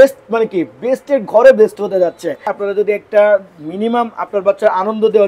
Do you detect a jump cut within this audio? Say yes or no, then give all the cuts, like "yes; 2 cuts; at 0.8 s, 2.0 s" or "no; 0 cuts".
yes; 1 cut; at 2.5 s